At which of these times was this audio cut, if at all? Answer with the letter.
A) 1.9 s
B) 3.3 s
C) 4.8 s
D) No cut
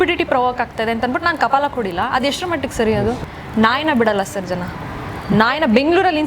B